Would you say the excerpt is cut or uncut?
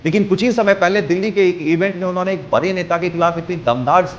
uncut